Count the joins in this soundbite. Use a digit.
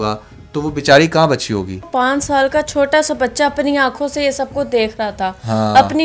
1